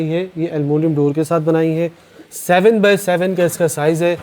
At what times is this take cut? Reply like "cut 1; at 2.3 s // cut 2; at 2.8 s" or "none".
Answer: none